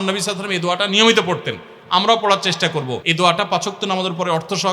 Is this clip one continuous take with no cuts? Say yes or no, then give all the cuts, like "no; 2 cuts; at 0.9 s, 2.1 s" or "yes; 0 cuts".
no; 1 cut; at 3.0 s